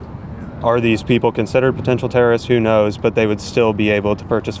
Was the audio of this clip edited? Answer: no; 0 cuts

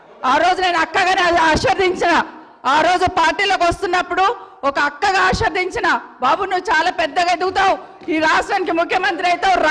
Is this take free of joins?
yes; 0 cuts

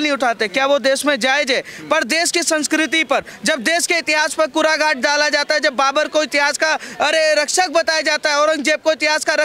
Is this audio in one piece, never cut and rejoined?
yes; 0 cuts

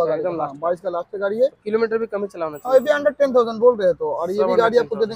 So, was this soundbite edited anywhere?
no; 0 cuts

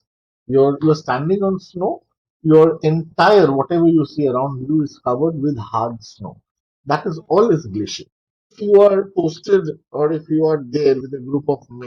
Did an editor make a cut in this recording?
yes; 1 cut; at 8.6 s

